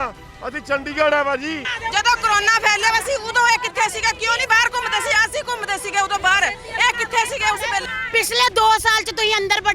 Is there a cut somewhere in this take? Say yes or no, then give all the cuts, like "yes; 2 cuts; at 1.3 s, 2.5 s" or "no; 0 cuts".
no; 0 cuts